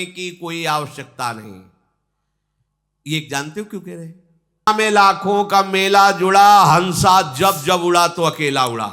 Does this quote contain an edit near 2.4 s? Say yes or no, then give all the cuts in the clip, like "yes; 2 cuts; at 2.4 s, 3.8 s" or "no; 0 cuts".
no; 1 cut; at 4.5 s